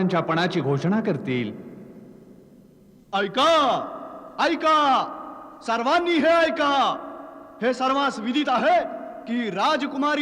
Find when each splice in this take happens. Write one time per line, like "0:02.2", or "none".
none